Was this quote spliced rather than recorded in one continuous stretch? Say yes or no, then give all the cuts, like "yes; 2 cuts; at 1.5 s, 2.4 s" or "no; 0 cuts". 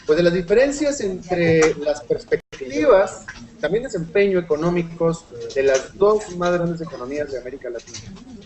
no; 0 cuts